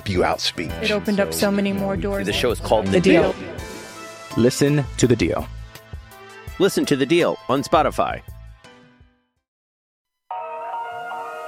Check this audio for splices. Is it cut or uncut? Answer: cut